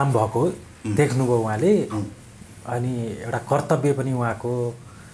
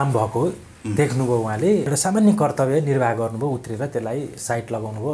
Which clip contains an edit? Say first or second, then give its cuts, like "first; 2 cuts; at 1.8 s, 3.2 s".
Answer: second; 1 cut; at 1.9 s